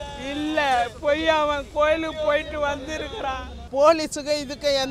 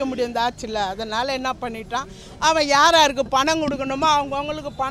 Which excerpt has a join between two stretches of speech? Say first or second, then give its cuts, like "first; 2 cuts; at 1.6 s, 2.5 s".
first; 1 cut; at 3.5 s